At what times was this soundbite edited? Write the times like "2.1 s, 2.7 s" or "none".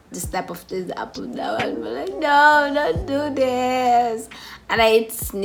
none